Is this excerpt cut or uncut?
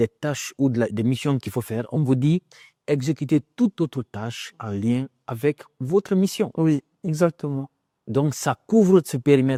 uncut